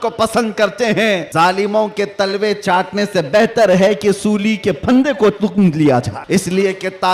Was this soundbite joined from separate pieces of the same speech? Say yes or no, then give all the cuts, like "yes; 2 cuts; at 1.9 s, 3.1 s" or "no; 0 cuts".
yes; 2 cuts; at 1.3 s, 6.2 s